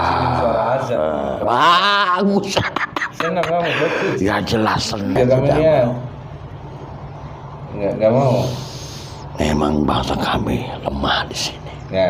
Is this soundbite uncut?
no; 1 cut; at 5.1 s

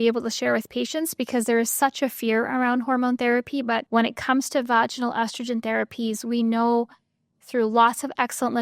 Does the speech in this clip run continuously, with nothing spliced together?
no; 1 cut; at 3.8 s

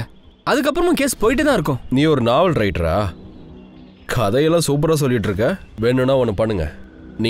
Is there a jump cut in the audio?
yes; 1 cut; at 1.8 s

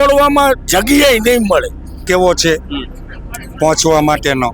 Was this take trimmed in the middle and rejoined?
yes; 1 cut; at 2.0 s

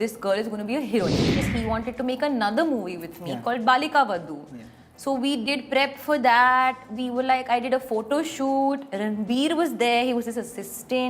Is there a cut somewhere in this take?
yes; 1 cut; at 1.4 s

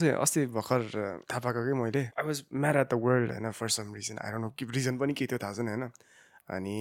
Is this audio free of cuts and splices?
no; 2 cuts; at 1.2 s, 2.1 s

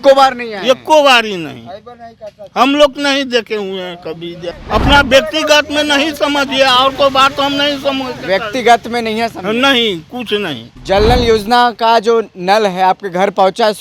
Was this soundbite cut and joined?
yes; 1 cut; at 4.5 s

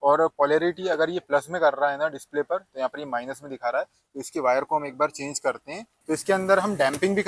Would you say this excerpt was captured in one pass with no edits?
no; 1 cut; at 5.9 s

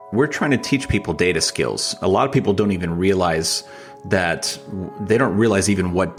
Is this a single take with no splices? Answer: yes; 0 cuts

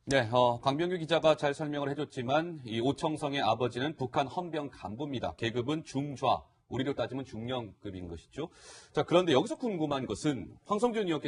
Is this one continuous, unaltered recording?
yes; 0 cuts

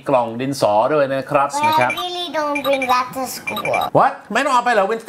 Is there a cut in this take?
yes; 1 cut; at 1.5 s

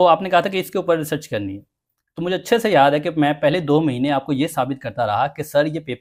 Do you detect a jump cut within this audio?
no; 0 cuts

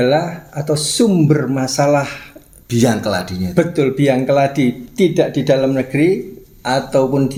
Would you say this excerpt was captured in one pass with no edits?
yes; 0 cuts

